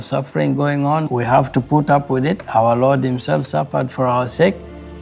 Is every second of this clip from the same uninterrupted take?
no; 1 cut; at 1.1 s

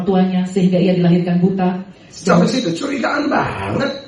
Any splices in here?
no; 0 cuts

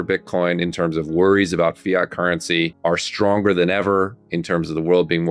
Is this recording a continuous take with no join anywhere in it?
no; 1 cut; at 2.7 s

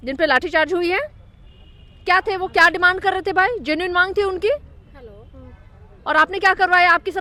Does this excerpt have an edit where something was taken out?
no; 0 cuts

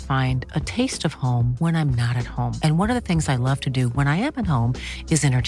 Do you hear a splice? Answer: no; 0 cuts

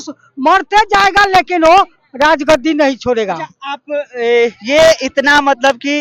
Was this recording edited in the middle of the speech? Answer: no; 0 cuts

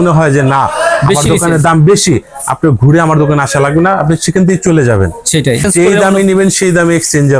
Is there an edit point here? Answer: yes; 1 cut; at 5.7 s

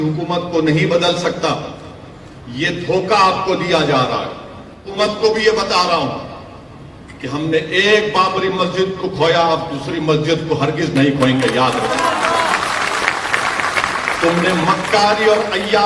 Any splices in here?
yes; 1 cut; at 4.9 s

